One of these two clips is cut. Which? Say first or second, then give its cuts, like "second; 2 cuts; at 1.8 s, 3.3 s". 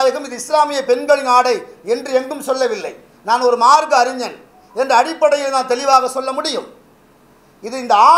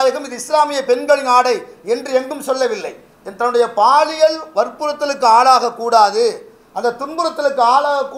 second; 1 cut; at 3.1 s